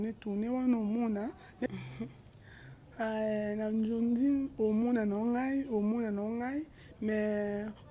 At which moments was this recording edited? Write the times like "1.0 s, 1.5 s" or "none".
1.7 s